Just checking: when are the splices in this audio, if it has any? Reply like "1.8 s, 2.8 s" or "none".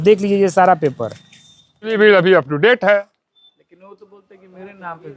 1.9 s